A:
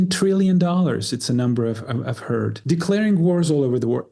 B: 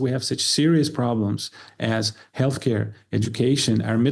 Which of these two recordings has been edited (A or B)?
A